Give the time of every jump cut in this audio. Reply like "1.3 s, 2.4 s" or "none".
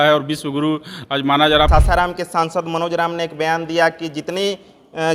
1.7 s